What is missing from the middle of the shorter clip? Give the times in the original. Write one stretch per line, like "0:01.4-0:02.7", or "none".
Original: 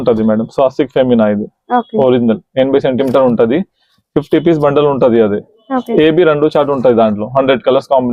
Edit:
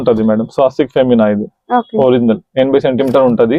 none